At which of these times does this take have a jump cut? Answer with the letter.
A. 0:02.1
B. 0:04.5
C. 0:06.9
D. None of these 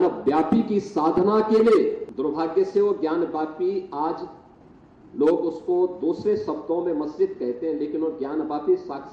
A